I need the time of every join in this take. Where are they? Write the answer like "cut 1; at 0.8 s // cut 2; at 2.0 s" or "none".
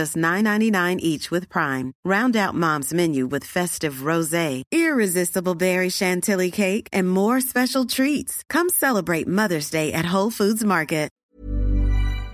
cut 1; at 11.1 s